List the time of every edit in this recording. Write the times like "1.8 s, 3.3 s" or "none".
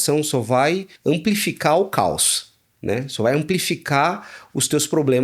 0.9 s